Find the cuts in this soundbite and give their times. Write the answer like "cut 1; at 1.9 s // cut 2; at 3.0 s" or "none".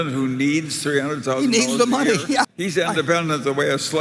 cut 1; at 2.5 s